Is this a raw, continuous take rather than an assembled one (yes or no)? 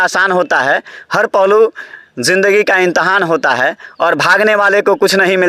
yes